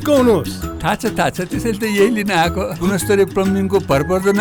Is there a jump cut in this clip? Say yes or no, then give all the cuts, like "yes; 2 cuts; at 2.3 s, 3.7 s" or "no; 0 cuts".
no; 0 cuts